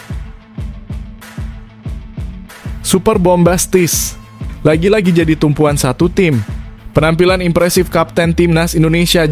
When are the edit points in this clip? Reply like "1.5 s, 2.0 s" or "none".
2.7 s

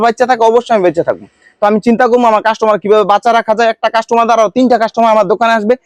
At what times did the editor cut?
none

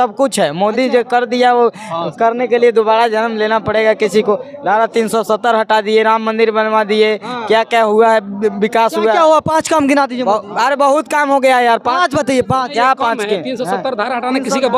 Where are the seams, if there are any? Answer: none

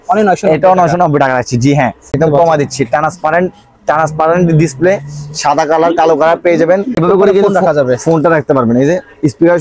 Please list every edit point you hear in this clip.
2.2 s, 7.0 s

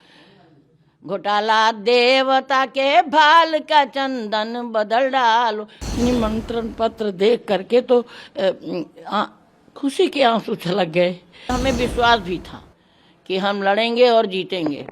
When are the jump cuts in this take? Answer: 5.7 s, 11.5 s

